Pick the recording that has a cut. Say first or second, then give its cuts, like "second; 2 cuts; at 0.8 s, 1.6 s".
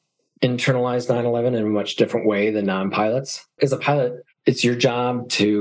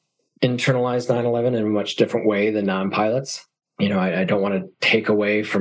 first; 1 cut; at 3.5 s